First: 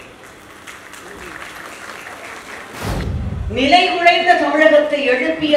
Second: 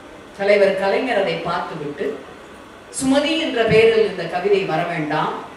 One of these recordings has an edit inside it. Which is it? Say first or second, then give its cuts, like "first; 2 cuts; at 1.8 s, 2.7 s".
first; 1 cut; at 2.9 s